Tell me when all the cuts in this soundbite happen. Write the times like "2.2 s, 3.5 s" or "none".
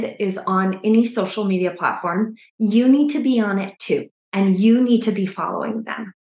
none